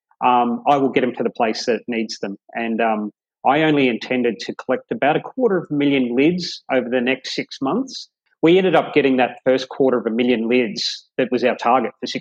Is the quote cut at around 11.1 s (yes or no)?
no